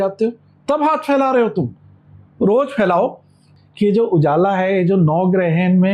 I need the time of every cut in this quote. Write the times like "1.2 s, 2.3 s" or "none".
3.5 s